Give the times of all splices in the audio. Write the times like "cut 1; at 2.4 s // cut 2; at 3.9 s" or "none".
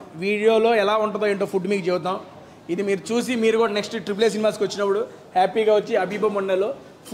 none